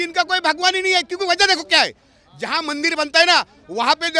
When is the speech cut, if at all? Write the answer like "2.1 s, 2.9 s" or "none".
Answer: none